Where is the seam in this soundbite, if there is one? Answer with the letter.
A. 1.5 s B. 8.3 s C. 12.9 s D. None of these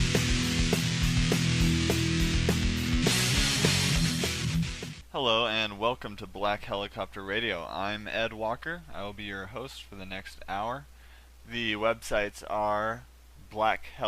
A